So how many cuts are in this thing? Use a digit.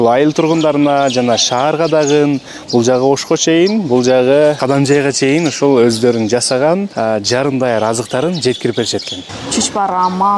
3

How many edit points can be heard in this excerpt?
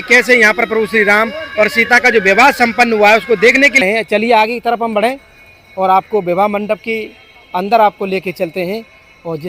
1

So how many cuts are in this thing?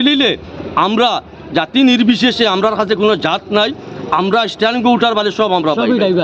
0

